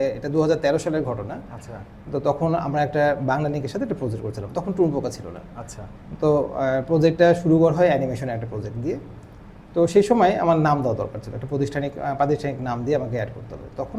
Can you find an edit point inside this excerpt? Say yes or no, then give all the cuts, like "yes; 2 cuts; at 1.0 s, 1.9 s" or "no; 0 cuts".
no; 0 cuts